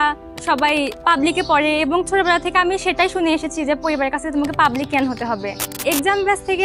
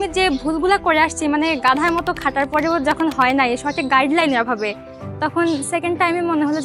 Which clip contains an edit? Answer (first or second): first